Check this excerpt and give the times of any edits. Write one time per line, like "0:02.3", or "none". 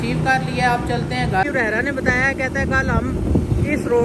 0:01.4